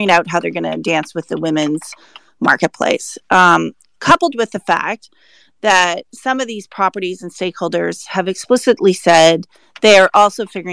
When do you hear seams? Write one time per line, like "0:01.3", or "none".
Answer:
none